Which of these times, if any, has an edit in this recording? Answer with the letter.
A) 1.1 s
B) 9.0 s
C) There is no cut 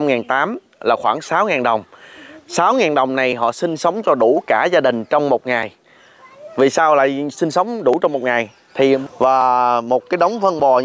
B